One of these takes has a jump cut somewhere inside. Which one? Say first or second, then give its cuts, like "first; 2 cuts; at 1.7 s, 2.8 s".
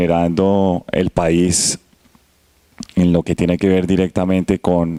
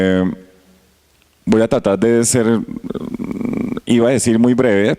second; 1 cut; at 3.4 s